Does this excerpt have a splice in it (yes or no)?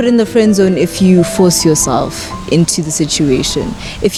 no